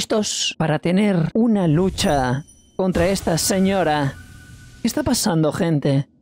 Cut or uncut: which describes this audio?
uncut